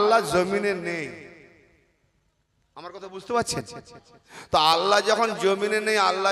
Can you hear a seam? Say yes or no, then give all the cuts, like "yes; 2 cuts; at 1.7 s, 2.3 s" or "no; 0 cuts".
no; 0 cuts